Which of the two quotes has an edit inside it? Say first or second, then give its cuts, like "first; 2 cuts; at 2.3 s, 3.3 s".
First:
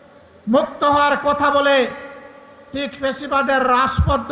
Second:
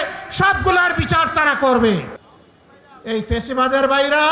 second; 1 cut; at 2.2 s